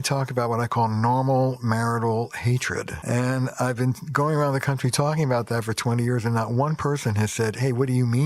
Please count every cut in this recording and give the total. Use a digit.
1